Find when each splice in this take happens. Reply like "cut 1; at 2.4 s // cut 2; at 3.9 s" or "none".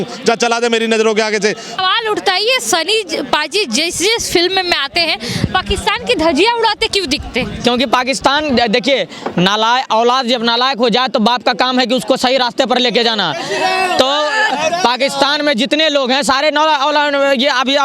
cut 1; at 1.8 s